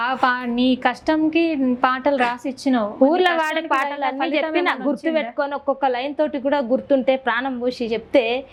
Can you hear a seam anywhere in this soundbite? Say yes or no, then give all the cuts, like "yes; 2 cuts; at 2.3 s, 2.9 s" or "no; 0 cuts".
no; 0 cuts